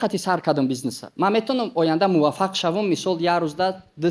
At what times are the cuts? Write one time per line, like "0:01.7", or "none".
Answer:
none